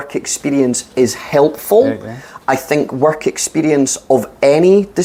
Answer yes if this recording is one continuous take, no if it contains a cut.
yes